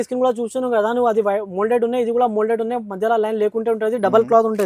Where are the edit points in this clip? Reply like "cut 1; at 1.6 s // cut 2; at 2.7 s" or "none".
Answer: none